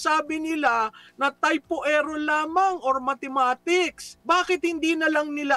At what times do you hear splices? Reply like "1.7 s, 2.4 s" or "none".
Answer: 4.1 s